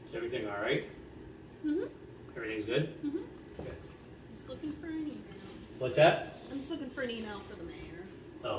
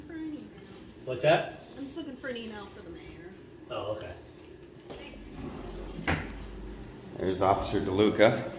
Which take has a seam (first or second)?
second